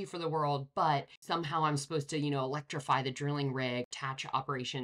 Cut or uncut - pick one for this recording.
cut